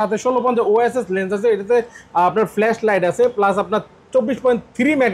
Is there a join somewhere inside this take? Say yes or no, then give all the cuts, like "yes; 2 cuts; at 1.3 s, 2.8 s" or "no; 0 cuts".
no; 0 cuts